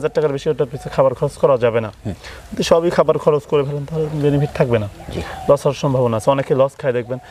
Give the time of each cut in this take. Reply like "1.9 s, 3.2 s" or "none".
none